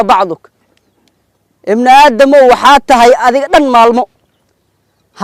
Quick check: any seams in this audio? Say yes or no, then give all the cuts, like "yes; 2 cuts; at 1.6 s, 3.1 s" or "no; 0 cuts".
no; 0 cuts